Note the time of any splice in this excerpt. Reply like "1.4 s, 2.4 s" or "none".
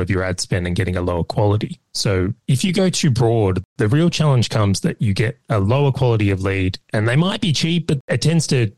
1.9 s